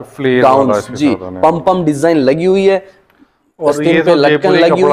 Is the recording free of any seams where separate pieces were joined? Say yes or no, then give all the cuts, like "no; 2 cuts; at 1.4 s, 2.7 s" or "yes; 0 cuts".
yes; 0 cuts